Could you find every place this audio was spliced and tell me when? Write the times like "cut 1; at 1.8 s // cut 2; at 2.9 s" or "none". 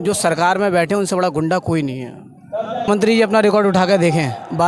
cut 1; at 2.9 s